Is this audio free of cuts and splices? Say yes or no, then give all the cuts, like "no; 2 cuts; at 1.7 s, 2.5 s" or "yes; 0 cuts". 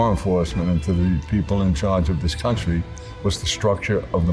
yes; 0 cuts